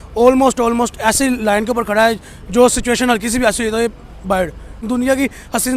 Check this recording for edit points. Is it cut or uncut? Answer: cut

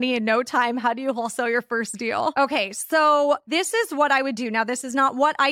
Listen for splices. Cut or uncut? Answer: cut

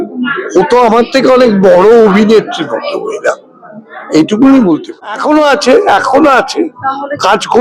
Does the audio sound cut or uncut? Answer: cut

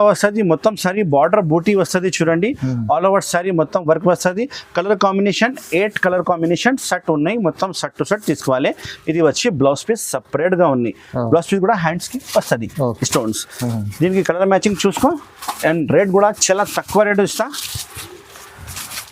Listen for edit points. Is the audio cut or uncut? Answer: uncut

